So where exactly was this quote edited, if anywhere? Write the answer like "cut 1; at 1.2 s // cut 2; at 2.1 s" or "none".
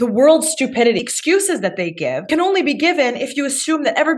cut 1; at 1.0 s // cut 2; at 2.3 s